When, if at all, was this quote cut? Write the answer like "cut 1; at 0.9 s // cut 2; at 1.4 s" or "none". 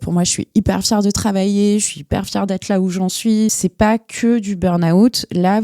cut 1; at 3.6 s